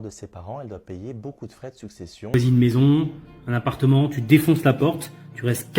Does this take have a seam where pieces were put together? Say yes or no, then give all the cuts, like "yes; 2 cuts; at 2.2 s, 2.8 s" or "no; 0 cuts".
yes; 1 cut; at 2.3 s